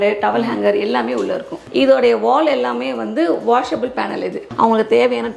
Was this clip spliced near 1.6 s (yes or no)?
yes